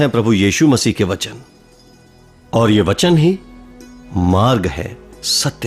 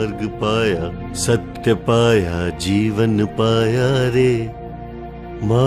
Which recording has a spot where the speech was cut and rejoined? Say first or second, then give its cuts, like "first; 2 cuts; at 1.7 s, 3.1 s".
second; 1 cut; at 4.1 s